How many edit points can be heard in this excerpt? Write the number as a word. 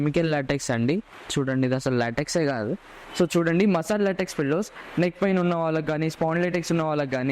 three